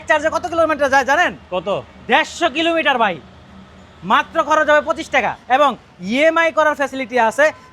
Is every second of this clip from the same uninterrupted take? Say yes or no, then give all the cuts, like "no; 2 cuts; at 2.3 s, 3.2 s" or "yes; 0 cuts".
no; 1 cut; at 5.4 s